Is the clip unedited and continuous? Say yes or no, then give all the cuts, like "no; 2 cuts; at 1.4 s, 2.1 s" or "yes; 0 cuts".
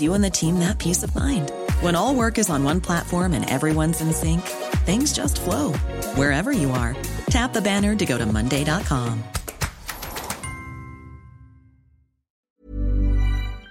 no; 1 cut; at 12.3 s